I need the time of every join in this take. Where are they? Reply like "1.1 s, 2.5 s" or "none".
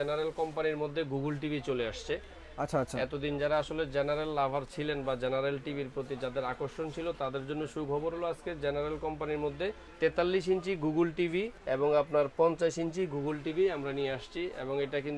none